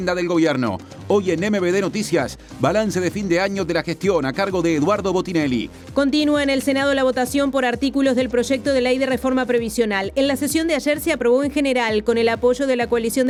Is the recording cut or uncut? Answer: uncut